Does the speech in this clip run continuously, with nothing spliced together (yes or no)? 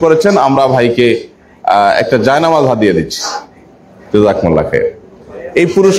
yes